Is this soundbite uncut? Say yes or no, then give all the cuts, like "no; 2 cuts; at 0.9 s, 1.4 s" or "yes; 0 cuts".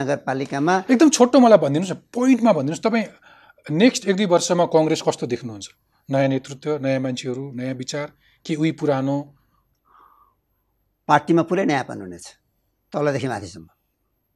yes; 0 cuts